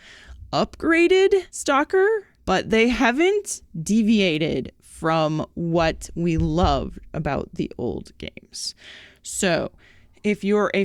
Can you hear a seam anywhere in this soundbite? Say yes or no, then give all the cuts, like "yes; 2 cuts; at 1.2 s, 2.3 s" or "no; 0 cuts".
yes; 2 cuts; at 1.5 s, 2.3 s